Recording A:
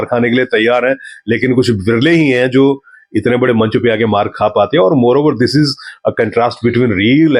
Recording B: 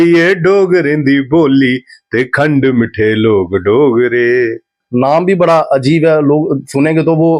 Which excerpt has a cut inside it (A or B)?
B